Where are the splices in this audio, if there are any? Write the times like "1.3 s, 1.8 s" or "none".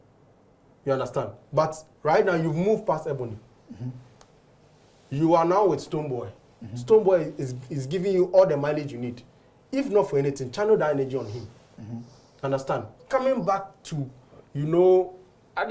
none